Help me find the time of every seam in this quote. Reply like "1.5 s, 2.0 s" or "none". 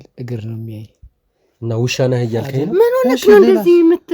2.7 s